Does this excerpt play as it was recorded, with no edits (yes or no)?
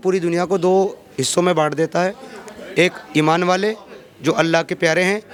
yes